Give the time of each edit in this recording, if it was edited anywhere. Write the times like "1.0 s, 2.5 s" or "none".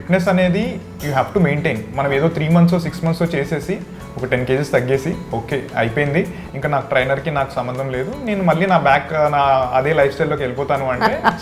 none